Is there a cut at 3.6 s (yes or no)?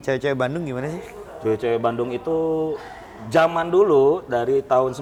no